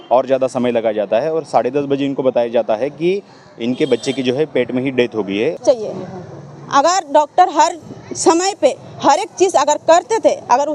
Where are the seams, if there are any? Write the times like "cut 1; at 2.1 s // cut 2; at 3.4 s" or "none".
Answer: cut 1; at 5.6 s